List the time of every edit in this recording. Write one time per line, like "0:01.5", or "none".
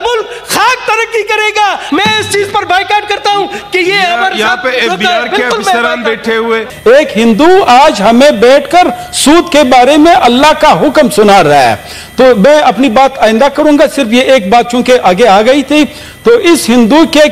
0:01.8
0:06.7

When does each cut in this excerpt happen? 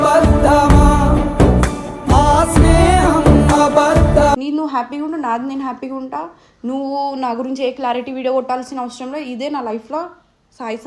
0:04.4

